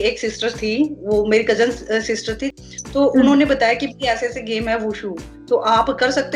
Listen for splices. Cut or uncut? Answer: cut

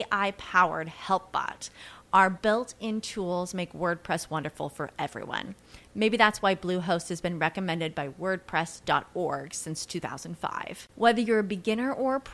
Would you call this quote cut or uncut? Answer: uncut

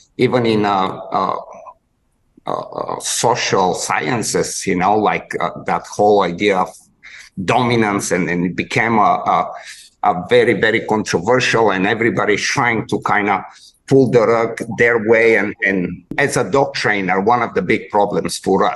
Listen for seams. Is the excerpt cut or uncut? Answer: cut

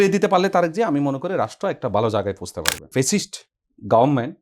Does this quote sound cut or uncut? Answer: cut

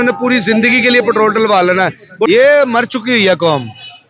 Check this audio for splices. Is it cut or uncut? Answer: cut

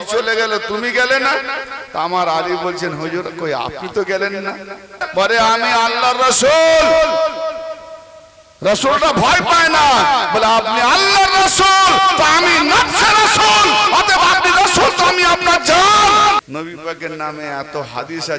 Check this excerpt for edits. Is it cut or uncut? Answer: cut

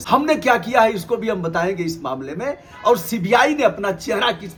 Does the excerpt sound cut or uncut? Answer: uncut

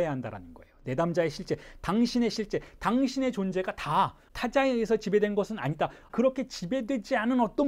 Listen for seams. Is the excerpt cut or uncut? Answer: cut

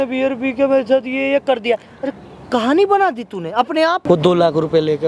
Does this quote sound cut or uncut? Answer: cut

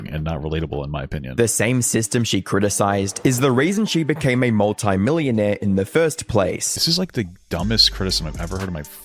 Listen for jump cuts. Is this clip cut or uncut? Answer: cut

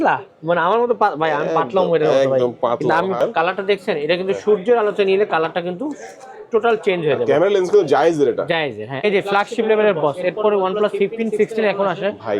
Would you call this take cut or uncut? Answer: cut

